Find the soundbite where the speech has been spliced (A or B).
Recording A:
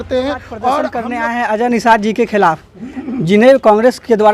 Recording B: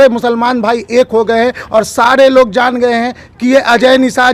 A